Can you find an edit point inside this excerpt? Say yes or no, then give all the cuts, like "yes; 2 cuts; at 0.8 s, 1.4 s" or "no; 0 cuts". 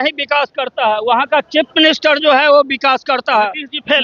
no; 0 cuts